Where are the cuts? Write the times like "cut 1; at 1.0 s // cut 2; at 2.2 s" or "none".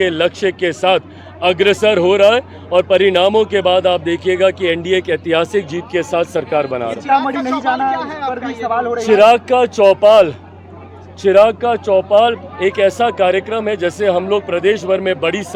none